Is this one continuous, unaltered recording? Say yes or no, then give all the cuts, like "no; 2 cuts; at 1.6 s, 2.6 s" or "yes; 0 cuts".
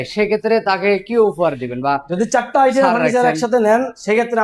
yes; 0 cuts